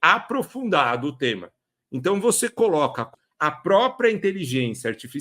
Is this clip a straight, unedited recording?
no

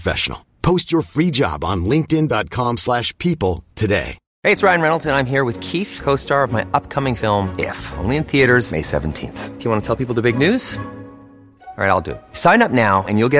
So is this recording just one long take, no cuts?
no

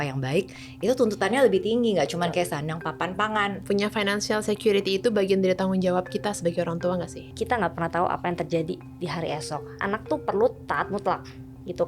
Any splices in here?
yes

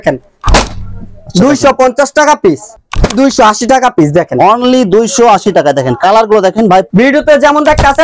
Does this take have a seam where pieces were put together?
yes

